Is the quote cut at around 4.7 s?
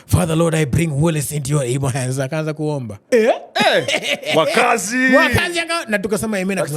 no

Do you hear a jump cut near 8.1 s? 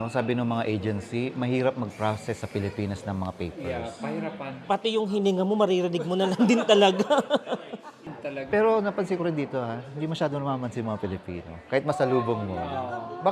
yes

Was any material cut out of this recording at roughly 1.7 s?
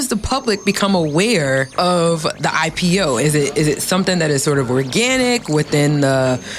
yes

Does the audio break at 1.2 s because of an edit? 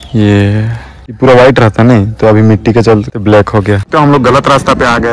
yes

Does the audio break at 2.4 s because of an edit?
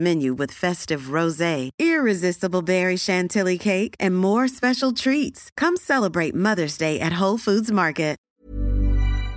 no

